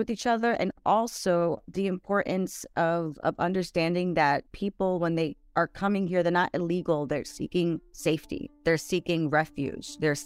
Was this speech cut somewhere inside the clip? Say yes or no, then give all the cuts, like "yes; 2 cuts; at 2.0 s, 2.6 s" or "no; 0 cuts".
no; 0 cuts